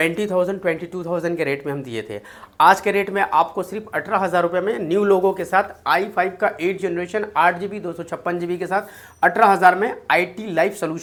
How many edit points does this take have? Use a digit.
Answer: 0